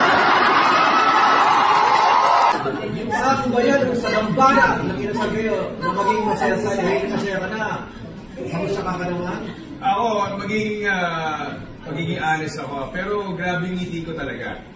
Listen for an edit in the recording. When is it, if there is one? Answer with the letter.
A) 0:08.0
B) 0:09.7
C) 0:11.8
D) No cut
D